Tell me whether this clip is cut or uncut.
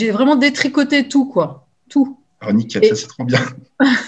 uncut